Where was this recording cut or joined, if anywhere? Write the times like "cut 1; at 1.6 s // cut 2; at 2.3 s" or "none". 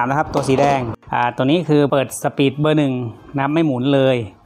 cut 1; at 1.0 s // cut 2; at 1.9 s